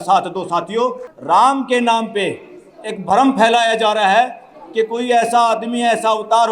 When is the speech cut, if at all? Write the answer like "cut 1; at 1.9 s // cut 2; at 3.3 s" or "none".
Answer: cut 1; at 1.1 s